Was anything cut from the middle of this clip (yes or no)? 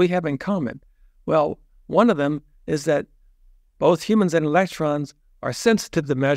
no